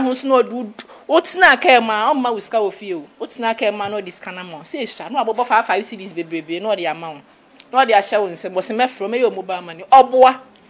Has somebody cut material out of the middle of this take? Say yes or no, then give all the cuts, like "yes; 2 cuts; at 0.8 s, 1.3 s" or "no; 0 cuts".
no; 0 cuts